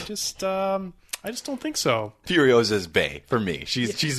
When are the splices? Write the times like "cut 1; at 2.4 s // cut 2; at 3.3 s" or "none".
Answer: cut 1; at 2.2 s